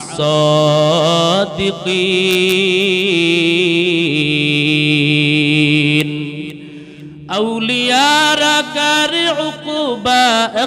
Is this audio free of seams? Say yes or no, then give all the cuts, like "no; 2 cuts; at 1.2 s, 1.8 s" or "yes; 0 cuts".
yes; 0 cuts